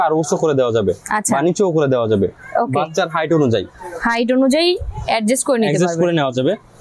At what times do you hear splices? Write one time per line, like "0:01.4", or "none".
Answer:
none